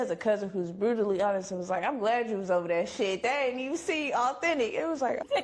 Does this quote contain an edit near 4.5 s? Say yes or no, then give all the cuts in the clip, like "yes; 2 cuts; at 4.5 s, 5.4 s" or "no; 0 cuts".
no; 0 cuts